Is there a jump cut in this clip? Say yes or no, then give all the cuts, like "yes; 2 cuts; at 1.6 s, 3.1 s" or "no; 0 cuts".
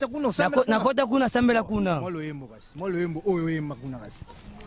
no; 0 cuts